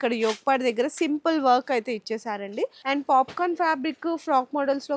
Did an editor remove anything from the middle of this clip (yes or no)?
yes